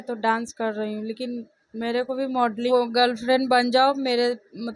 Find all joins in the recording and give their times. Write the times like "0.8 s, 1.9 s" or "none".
2.7 s